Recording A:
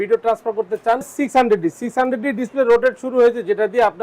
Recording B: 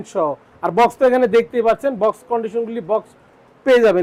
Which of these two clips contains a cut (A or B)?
A